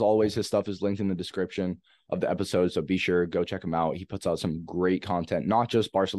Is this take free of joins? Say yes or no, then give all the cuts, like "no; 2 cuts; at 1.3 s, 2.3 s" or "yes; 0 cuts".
yes; 0 cuts